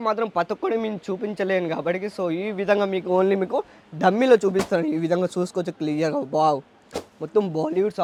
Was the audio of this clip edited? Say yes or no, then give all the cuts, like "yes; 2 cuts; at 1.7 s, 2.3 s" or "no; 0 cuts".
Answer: no; 0 cuts